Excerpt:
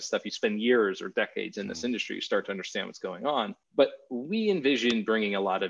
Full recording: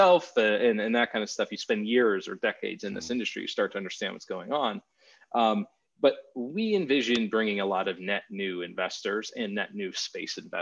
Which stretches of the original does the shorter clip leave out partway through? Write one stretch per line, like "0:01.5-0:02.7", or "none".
0:04.9-0:05.9